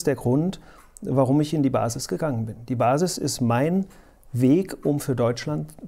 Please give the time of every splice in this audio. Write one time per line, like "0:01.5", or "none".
none